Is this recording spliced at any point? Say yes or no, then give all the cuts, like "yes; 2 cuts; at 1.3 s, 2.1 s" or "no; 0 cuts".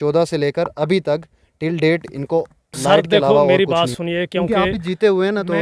yes; 1 cut; at 3.5 s